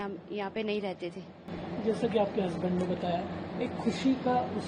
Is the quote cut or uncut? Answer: uncut